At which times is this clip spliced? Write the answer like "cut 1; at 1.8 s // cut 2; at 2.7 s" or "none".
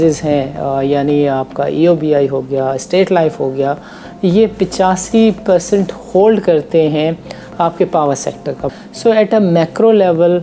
cut 1; at 8.6 s